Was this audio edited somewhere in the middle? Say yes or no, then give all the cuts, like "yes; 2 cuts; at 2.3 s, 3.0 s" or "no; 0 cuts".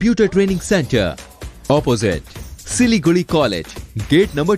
no; 0 cuts